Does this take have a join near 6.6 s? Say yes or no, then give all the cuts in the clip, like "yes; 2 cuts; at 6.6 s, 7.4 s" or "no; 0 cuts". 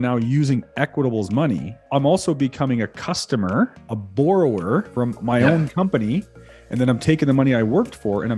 no; 2 cuts; at 1.9 s, 4.9 s